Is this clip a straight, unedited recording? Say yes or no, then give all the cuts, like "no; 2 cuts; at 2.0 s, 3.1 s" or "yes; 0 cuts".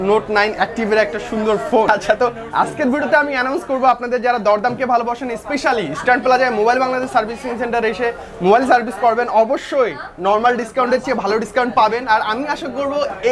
no; 1 cut; at 1.9 s